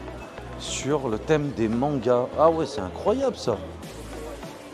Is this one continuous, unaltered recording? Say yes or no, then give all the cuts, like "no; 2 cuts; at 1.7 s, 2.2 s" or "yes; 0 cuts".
yes; 0 cuts